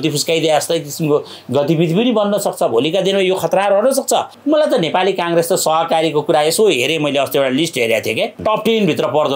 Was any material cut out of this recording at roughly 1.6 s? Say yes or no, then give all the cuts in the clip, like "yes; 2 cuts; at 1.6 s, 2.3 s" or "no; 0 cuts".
no; 2 cuts; at 4.3 s, 8.4 s